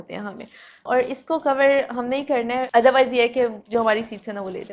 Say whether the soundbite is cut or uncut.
cut